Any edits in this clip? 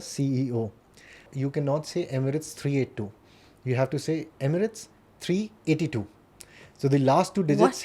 yes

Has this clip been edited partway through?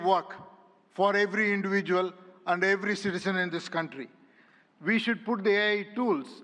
no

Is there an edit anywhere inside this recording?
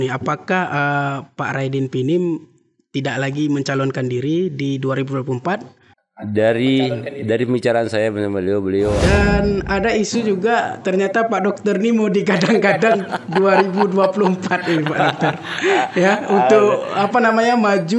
yes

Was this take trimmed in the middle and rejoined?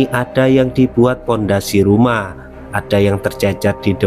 no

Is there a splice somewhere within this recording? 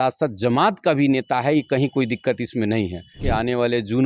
yes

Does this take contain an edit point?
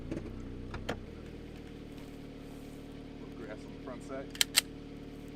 yes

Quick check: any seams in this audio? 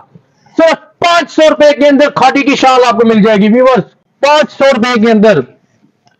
no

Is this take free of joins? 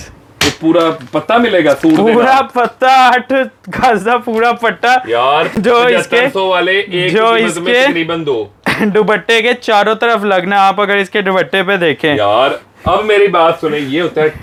yes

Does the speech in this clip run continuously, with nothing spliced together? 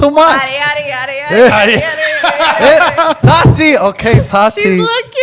yes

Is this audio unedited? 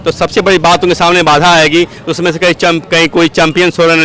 yes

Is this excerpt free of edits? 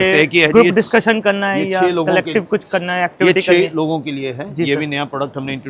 yes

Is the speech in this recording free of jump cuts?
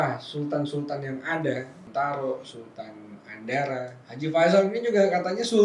no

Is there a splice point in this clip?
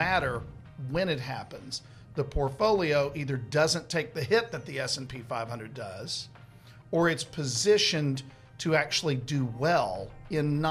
no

